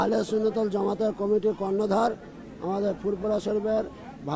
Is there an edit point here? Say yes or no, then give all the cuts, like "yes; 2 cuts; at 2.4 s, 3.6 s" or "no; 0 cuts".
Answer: no; 0 cuts